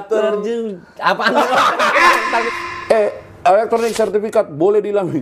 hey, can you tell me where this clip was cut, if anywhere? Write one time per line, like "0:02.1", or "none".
0:02.5